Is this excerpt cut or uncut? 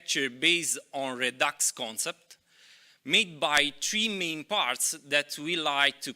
uncut